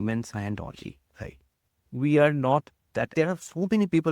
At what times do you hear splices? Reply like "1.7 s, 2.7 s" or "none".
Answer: 3.1 s